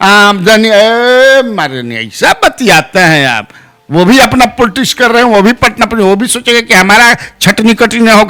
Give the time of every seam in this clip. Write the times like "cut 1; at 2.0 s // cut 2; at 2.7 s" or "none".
none

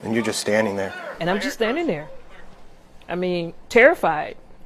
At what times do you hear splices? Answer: cut 1; at 1.0 s

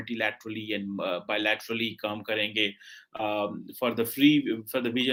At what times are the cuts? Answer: none

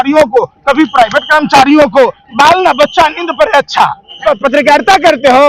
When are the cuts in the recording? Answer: cut 1; at 4.2 s

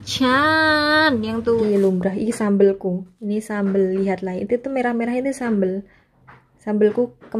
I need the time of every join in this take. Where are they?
cut 1; at 1.6 s

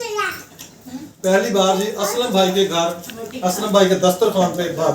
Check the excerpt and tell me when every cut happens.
none

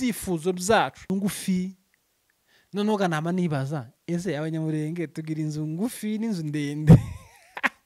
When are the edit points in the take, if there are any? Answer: cut 1; at 1.1 s

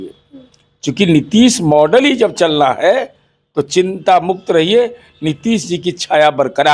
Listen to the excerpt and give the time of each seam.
none

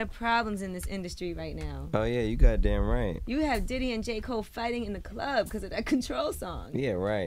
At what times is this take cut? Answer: cut 1; at 6.2 s

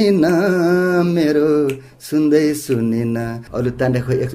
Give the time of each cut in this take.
cut 1; at 3.4 s

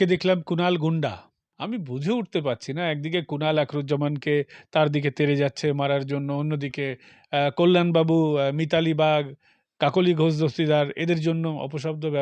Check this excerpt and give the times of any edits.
cut 1; at 1.5 s

